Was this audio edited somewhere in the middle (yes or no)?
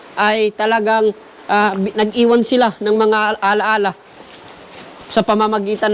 no